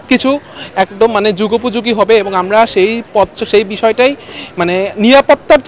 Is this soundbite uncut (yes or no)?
yes